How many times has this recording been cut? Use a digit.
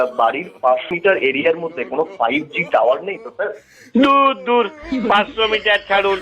1